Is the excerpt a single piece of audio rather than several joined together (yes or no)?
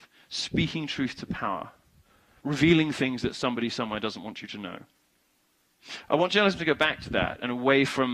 no